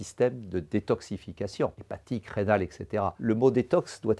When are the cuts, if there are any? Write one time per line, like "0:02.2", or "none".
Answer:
0:01.9
0:03.2